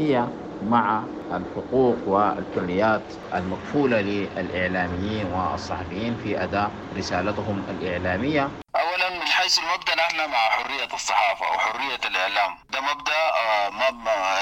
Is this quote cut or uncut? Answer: cut